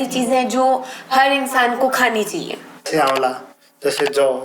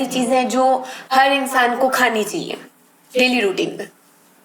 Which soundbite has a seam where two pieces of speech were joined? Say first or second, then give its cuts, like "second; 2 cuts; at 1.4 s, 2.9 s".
first; 1 cut; at 2.9 s